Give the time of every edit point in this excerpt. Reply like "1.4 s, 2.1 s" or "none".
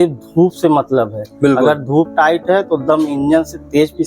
none